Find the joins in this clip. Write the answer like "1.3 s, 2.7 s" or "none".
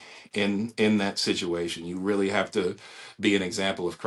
none